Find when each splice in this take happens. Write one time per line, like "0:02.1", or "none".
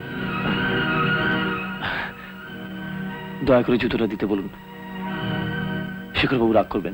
none

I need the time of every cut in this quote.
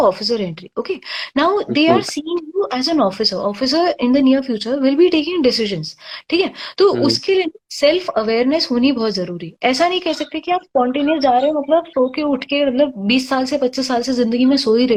none

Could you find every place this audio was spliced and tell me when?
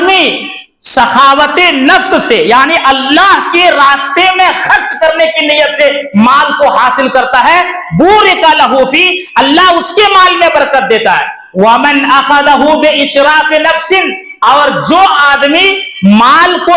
none

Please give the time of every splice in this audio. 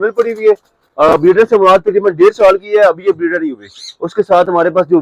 none

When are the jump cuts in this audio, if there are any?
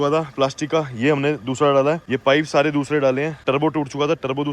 0:02.1
0:03.4

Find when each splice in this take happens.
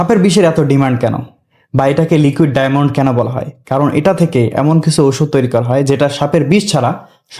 none

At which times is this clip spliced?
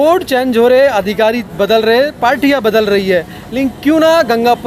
none

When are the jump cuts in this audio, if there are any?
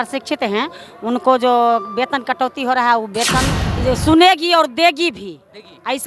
0:03.6

